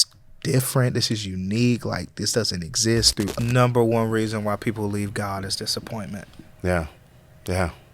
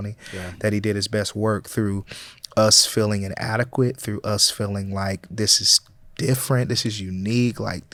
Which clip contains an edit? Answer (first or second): first